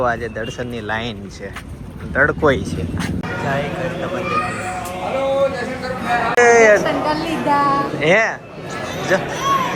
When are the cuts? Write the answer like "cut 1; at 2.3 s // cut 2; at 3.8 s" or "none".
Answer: none